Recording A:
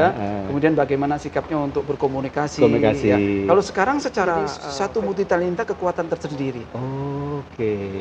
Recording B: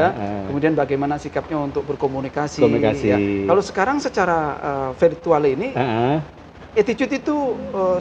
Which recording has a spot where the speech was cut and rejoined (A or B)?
A